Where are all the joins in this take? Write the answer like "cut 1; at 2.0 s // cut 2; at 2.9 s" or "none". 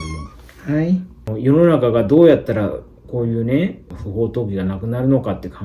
cut 1; at 1.2 s // cut 2; at 4.0 s